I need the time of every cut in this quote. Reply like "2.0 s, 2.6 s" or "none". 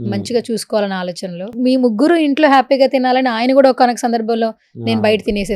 1.5 s